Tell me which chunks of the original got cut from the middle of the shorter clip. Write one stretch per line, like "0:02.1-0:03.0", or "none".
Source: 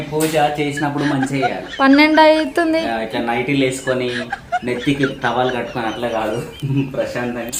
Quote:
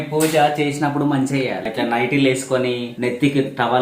0:01.6-0:03.0
0:04.3-0:04.6